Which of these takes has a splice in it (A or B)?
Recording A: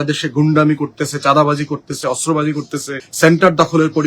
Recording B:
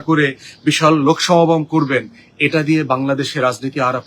A